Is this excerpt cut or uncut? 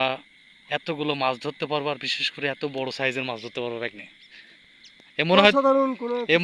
uncut